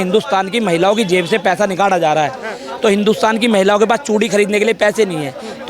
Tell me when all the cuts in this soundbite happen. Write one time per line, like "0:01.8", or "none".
none

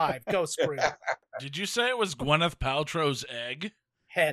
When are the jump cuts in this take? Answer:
0:01.2

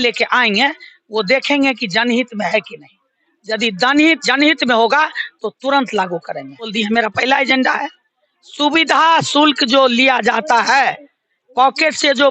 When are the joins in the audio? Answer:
0:06.7

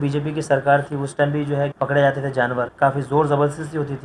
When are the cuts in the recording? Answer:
0:01.7
0:02.7

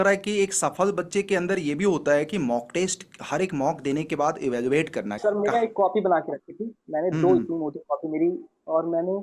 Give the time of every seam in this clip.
0:05.2

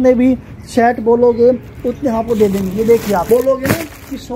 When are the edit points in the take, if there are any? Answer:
0:03.2

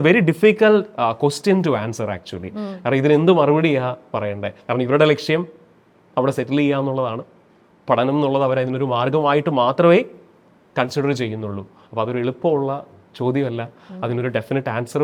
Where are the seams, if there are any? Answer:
none

